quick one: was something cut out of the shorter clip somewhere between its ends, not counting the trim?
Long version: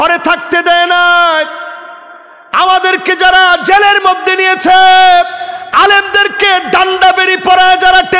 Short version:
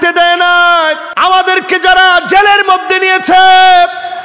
yes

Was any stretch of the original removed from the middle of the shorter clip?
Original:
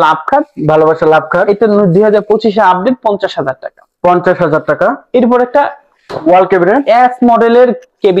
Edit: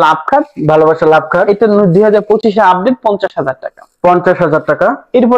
no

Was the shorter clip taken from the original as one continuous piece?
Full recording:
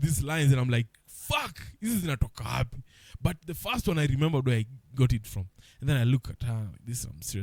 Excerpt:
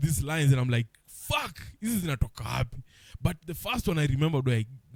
yes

